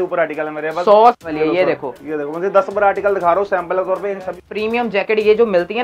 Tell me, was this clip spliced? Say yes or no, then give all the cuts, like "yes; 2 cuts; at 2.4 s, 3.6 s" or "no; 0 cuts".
yes; 2 cuts; at 1.2 s, 4.4 s